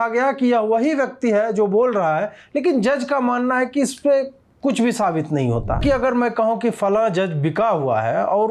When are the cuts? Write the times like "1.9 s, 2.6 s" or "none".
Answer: 5.8 s